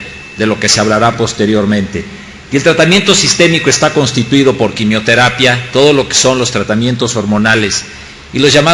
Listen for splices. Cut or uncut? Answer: cut